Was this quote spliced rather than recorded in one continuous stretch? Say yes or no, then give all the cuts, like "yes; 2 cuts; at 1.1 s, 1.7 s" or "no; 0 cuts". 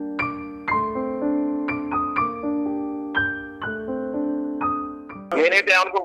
yes; 1 cut; at 5.2 s